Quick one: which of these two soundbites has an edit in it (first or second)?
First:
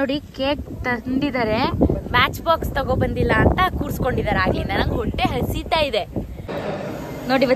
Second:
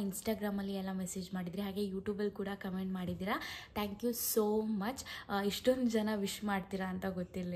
first